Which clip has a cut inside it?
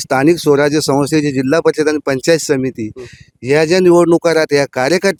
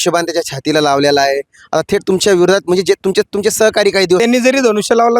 second; 1 cut; at 4.2 s

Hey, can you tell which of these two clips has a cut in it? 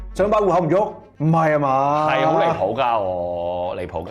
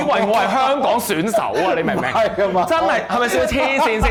first; 1 cut; at 1.1 s

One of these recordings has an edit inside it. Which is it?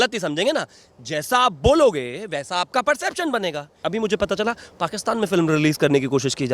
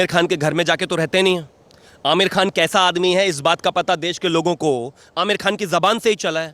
first; 1 cut; at 3.8 s

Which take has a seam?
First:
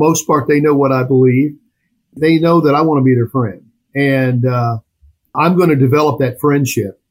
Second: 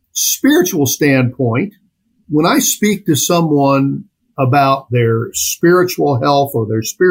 first; 1 cut; at 2.1 s

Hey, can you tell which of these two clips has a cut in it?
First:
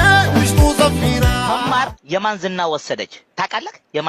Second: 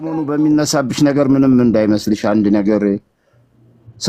first; 1 cut; at 1.6 s

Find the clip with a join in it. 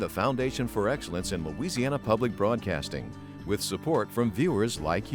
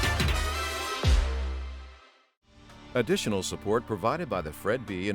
second; 1 cut; at 2.8 s

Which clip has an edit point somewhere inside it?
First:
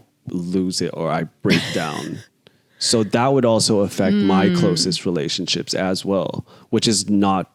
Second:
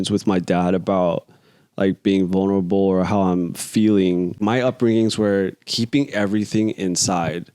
second; 1 cut; at 4.4 s

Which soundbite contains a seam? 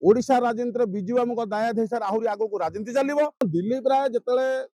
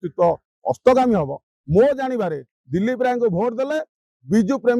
first; 1 cut; at 3.4 s

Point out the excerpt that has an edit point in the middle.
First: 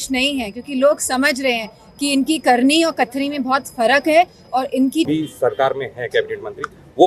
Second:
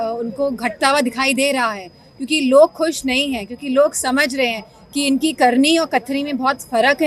first; 1 cut; at 5.1 s

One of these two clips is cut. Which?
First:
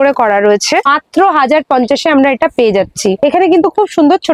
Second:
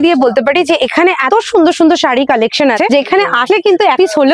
first; 2 cuts; at 0.9 s, 3.2 s

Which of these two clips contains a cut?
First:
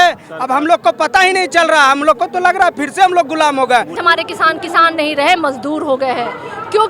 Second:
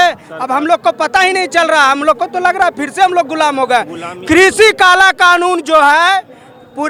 first; 1 cut; at 4.0 s

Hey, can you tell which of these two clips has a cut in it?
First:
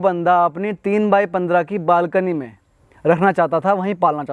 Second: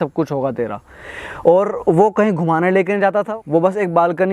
second; 1 cut; at 3.4 s

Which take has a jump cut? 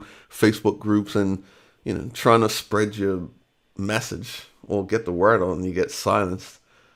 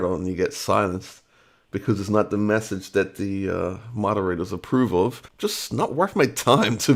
second; 1 cut; at 5.3 s

